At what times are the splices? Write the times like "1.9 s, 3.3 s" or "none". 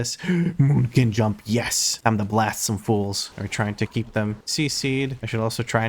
3.2 s